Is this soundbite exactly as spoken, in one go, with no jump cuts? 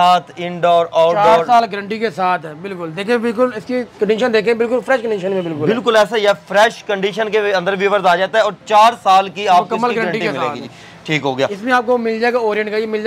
yes; 0 cuts

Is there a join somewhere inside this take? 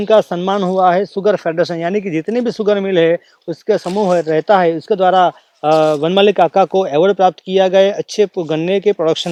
no; 0 cuts

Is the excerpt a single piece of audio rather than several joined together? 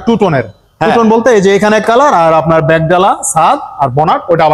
yes; 0 cuts

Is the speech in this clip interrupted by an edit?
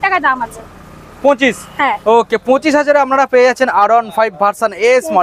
no; 0 cuts

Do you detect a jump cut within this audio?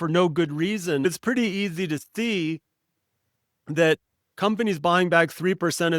yes; 1 cut; at 1.0 s

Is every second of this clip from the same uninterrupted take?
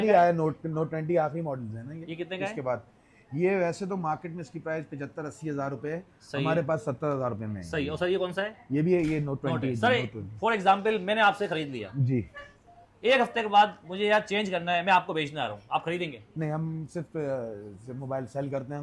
yes; 0 cuts

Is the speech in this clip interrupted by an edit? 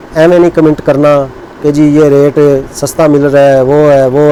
no; 0 cuts

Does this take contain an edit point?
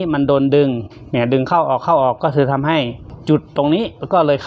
yes; 1 cut; at 3.1 s

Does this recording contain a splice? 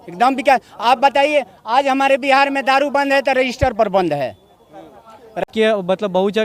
yes; 1 cut; at 5.4 s

